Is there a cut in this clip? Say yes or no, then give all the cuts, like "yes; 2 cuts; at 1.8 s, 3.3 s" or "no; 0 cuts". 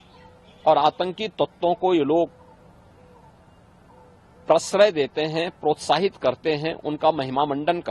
no; 0 cuts